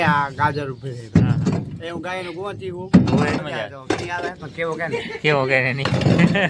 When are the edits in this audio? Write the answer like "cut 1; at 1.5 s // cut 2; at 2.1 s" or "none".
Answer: cut 1; at 3.4 s